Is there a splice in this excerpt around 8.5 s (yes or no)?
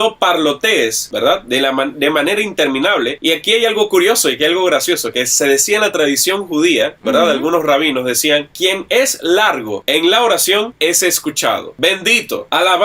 yes